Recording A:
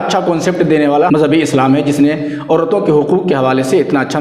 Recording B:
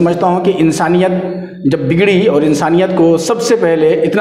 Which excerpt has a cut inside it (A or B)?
A